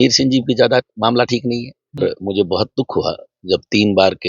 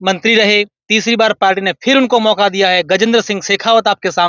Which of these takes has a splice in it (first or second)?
first